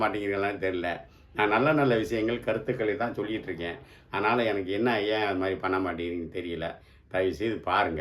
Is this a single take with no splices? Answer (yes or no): yes